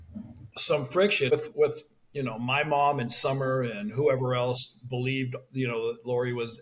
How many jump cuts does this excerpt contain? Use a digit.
1